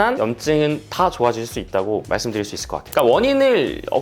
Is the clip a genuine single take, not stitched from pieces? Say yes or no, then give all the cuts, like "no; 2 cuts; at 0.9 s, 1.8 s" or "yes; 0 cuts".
no; 1 cut; at 2.9 s